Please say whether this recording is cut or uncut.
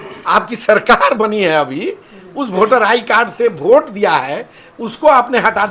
uncut